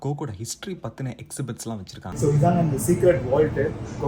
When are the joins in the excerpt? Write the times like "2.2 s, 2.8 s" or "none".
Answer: 2.2 s